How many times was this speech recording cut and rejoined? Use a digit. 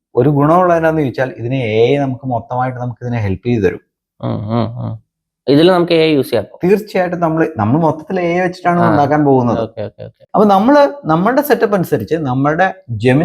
1